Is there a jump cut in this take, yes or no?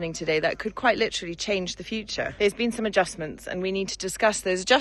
yes